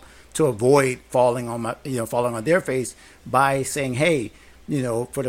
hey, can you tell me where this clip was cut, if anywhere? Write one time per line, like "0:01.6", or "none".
none